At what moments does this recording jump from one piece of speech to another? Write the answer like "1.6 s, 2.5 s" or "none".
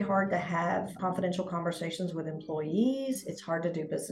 1.0 s